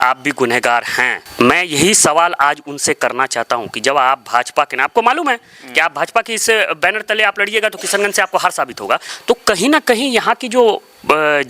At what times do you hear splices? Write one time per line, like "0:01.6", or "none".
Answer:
0:01.2
0:09.1